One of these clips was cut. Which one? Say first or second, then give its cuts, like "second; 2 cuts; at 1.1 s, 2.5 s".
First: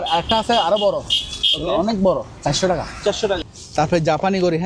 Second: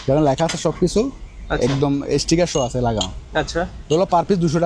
first; 1 cut; at 3.6 s